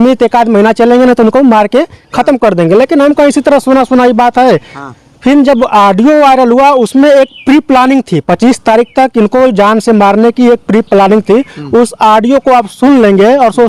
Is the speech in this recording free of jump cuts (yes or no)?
yes